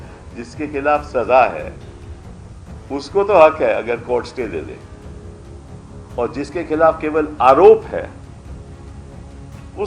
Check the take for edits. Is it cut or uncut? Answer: uncut